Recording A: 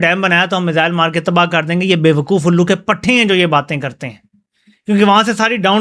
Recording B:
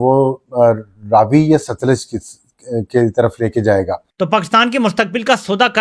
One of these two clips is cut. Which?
B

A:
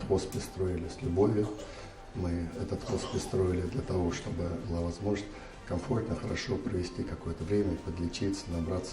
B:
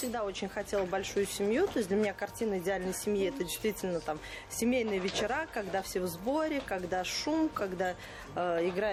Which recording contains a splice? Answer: A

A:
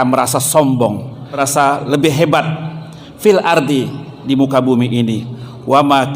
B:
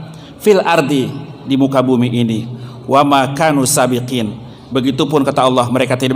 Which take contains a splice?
A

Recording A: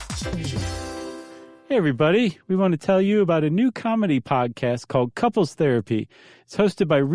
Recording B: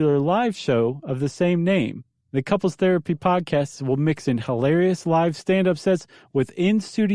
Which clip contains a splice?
A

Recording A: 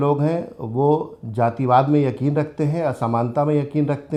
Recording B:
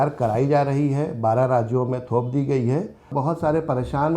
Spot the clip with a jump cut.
B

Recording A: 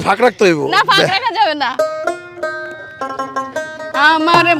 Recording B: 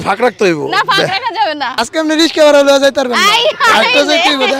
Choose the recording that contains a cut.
B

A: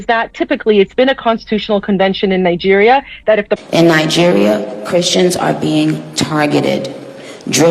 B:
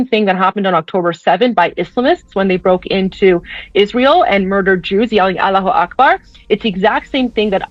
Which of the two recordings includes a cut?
A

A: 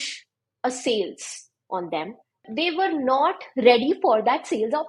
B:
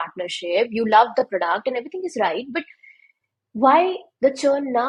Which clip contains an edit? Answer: A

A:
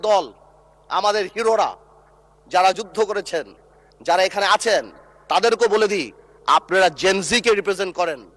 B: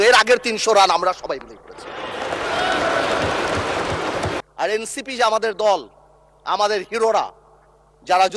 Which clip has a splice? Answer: B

